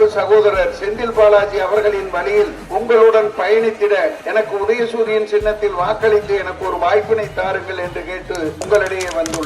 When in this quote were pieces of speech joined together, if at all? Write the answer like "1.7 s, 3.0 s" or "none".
2.6 s, 4.2 s, 8.6 s